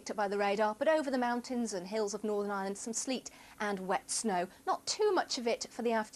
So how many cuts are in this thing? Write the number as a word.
zero